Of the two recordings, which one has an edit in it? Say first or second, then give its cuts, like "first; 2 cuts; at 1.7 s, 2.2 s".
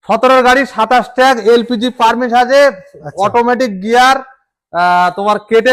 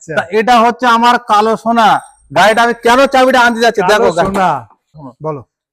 second; 1 cut; at 4.6 s